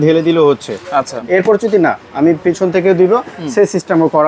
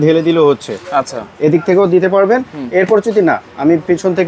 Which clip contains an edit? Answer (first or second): first